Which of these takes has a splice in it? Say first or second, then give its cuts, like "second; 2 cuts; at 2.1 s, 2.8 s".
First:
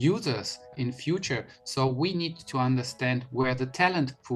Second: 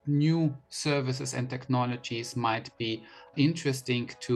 first; 2 cuts; at 0.7 s, 2.5 s